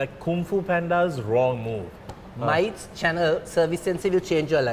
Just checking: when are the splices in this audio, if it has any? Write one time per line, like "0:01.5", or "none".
none